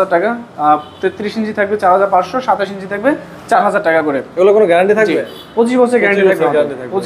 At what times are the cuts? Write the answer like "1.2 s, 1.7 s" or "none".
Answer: none